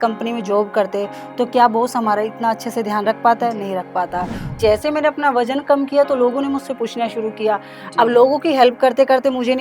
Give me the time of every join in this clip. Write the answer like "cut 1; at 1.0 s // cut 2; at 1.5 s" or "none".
cut 1; at 4.5 s